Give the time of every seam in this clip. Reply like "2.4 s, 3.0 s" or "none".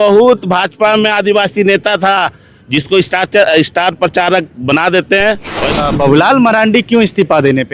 5.8 s